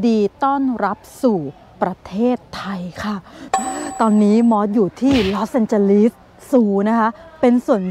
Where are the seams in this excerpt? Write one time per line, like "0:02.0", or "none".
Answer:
0:03.3

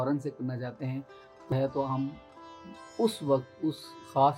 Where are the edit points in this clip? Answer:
0:01.5

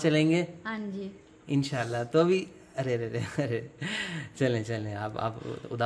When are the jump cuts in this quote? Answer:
none

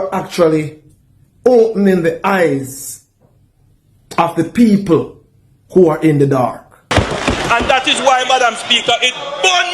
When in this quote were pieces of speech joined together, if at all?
0:06.9

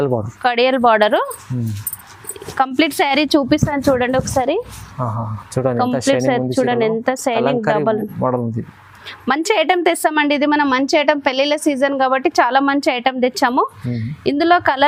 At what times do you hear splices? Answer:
none

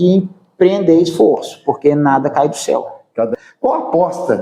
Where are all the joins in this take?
0:03.3

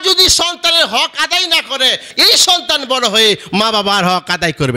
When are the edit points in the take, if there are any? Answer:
0:02.1

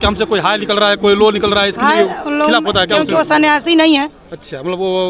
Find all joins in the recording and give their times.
none

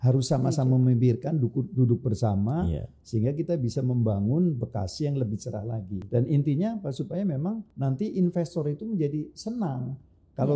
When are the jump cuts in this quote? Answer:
0:06.0
0:07.7

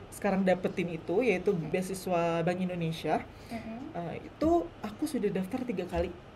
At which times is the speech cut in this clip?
0:01.7

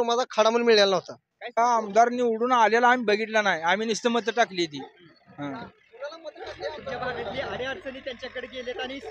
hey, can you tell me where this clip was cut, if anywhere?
0:01.6

